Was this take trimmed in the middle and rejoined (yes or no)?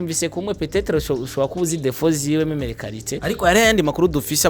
yes